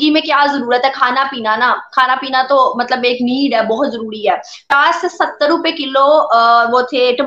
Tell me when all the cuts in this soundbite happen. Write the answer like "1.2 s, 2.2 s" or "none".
4.7 s